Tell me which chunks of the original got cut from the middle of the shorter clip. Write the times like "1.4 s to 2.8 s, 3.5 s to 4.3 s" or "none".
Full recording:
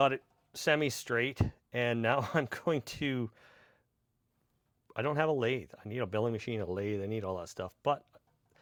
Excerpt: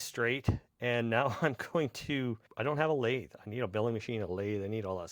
3.4 s to 4.9 s